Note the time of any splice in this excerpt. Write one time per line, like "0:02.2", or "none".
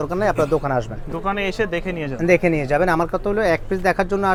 none